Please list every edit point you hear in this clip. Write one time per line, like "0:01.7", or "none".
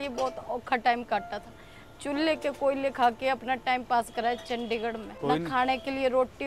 0:05.1